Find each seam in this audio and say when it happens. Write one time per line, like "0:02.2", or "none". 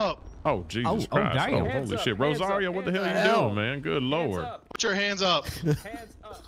none